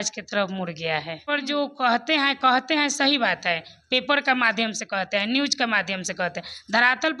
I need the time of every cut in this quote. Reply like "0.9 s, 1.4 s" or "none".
1.2 s